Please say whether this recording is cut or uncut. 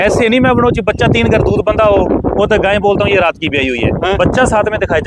uncut